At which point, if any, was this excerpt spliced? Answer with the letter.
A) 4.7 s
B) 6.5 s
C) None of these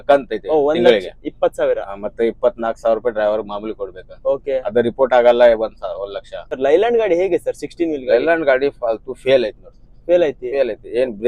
B